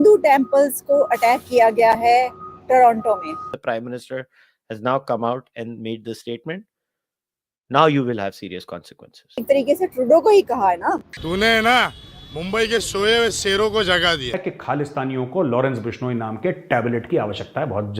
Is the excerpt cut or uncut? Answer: cut